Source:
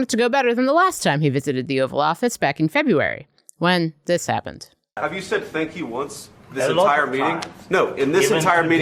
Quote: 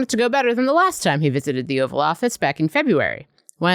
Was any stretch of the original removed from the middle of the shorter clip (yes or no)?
no